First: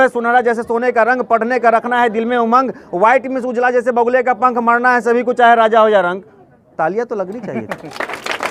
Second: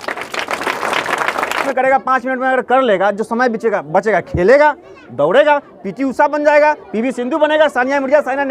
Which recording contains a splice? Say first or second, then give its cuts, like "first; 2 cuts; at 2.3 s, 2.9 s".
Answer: second; 1 cut; at 1.7 s